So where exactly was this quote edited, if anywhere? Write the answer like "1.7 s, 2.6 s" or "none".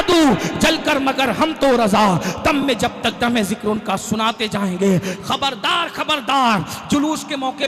none